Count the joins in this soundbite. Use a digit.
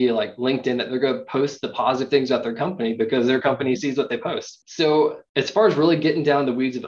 0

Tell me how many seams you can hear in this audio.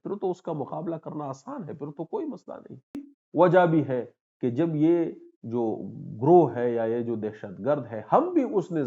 1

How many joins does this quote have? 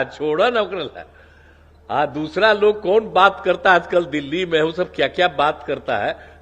0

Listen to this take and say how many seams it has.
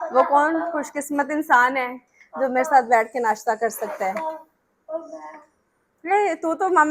0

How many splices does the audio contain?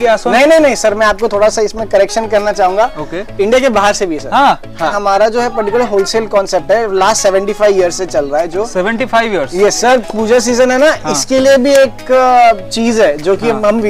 2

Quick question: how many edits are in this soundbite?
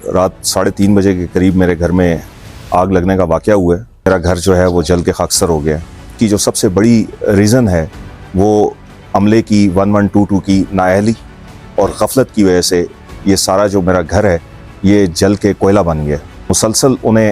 3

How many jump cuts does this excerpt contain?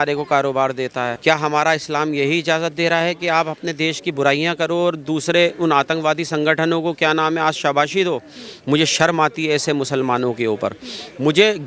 1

